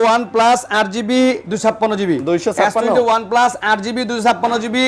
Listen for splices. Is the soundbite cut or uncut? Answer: uncut